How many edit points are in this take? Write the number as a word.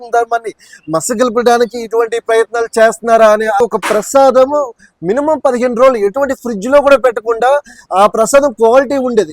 one